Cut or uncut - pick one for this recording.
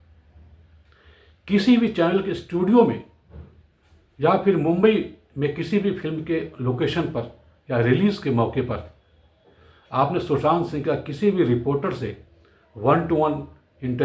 uncut